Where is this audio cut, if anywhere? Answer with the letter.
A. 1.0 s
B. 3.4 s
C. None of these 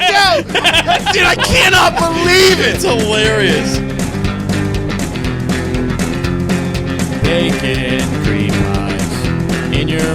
B